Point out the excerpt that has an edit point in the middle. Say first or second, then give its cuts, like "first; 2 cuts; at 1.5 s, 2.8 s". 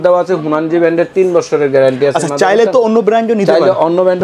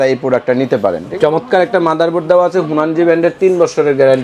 second; 1 cut; at 1.1 s